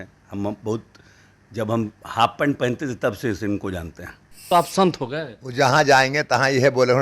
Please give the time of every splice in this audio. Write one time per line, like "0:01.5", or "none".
0:04.5